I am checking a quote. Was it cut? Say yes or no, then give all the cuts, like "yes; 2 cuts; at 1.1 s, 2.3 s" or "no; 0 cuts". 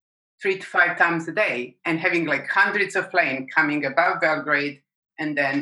no; 0 cuts